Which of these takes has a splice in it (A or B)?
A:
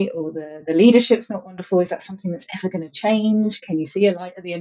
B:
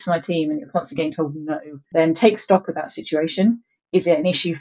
B